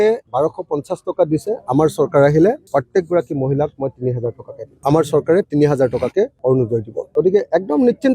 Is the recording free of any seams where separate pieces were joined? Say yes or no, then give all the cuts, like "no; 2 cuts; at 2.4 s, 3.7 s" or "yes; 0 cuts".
yes; 0 cuts